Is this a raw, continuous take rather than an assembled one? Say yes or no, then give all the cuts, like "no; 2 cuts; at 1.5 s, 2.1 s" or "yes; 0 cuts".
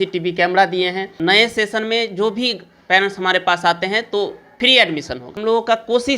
no; 3 cuts; at 1.1 s, 4.4 s, 5.3 s